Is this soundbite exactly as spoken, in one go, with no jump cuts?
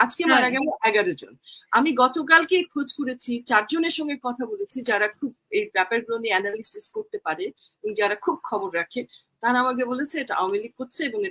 yes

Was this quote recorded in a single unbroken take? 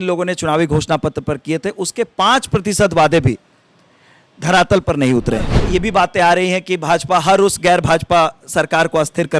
no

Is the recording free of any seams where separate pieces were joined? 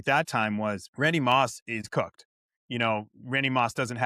no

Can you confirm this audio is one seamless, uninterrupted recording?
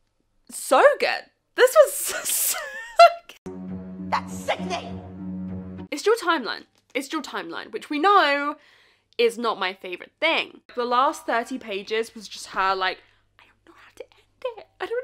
no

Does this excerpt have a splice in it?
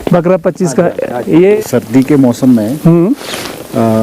yes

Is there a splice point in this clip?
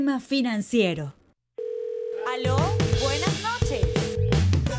no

